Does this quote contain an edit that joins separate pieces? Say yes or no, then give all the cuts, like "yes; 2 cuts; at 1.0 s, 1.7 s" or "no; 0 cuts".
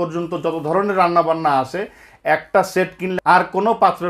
yes; 1 cut; at 3.1 s